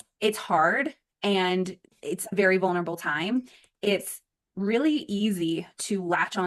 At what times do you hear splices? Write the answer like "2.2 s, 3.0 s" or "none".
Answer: none